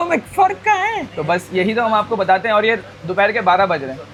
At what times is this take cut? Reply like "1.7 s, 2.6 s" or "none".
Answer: none